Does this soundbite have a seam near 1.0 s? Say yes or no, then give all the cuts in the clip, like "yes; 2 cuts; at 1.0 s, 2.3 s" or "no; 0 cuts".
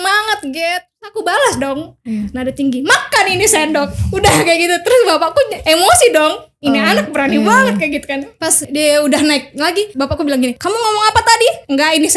yes; 1 cut; at 1.0 s